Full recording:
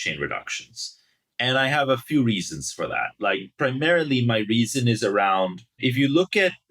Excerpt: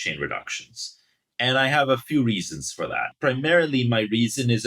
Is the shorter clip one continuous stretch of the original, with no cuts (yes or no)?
no